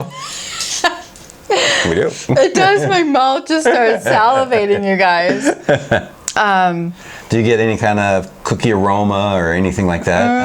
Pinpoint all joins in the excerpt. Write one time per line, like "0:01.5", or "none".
none